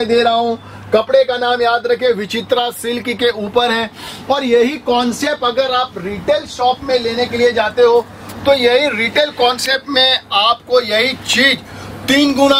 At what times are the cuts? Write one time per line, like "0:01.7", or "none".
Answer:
none